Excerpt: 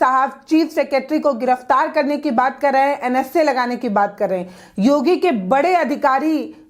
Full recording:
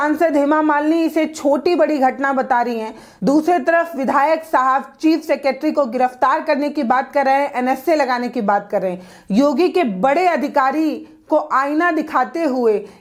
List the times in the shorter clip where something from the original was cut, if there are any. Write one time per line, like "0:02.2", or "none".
none

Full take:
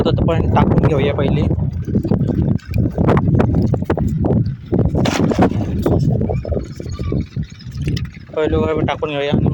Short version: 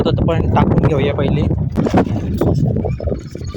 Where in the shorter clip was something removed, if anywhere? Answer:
0:01.8

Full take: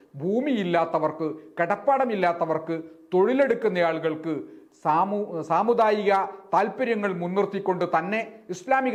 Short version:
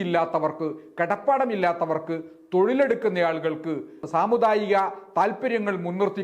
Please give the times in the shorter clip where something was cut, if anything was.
0:04.0

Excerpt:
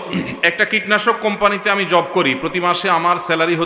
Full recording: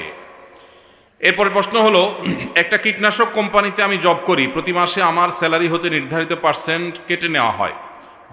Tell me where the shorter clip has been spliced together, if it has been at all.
none

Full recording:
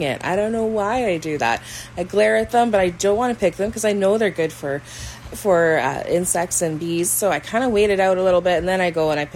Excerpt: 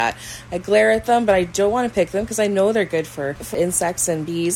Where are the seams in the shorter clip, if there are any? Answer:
0:03.5

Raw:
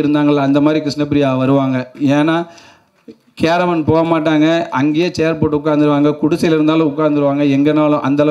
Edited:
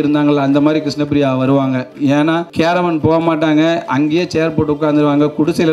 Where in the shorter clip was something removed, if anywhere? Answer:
0:02.5

